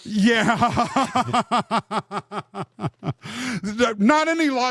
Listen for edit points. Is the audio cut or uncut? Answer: uncut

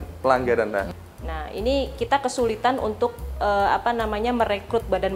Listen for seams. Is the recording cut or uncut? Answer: cut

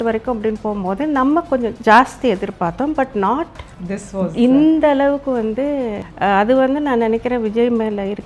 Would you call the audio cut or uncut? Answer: cut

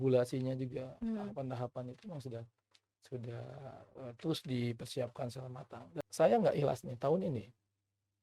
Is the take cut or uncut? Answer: cut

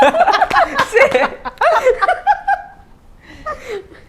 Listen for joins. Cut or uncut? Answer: uncut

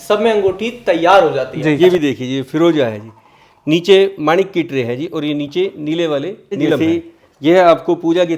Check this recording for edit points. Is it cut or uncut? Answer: cut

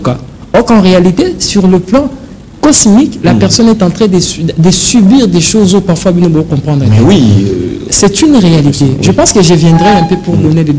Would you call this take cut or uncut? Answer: uncut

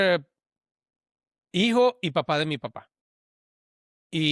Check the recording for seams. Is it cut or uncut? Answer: uncut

